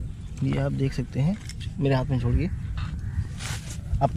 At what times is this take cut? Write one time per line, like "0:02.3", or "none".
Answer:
none